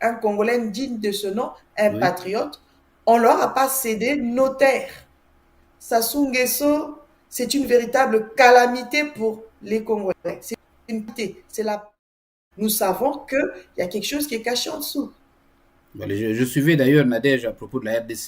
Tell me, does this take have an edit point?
yes; 1 cut; at 12.0 s

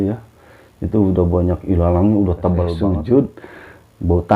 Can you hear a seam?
yes; 1 cut; at 2.7 s

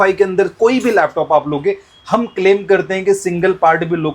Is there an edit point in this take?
no; 0 cuts

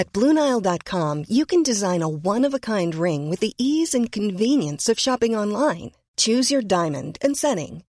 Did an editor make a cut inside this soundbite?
no; 0 cuts

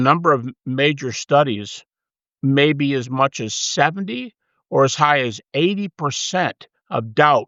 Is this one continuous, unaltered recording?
yes; 0 cuts

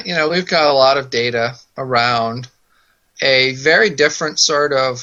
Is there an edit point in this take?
no; 0 cuts

